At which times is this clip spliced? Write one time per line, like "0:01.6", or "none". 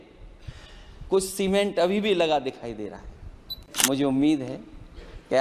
0:03.7